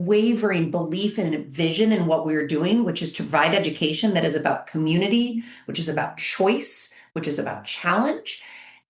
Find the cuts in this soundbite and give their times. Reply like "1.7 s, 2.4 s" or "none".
none